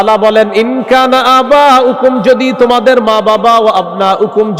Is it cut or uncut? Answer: uncut